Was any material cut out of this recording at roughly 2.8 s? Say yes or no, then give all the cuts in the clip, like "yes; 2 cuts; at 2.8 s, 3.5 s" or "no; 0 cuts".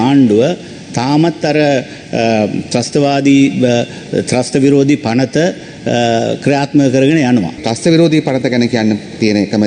no; 1 cut; at 7.7 s